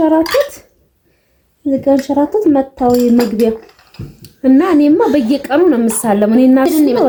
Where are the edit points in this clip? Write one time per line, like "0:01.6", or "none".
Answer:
none